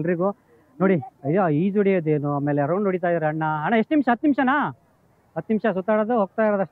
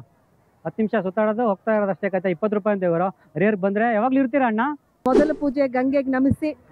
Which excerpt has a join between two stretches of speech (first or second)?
second